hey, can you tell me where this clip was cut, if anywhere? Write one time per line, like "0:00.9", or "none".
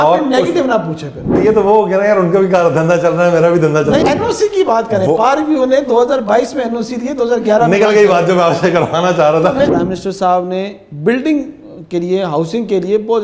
0:01.4
0:04.0
0:09.7